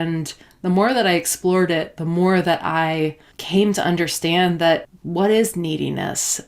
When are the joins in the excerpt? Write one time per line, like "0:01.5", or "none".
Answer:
0:03.3
0:05.0